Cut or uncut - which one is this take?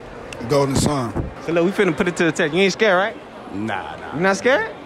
cut